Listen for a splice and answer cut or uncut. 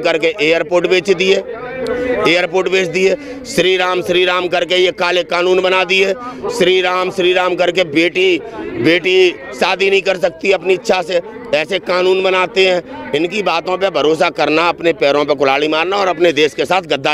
uncut